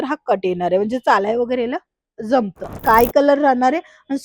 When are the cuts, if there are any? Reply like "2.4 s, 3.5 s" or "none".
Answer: 2.7 s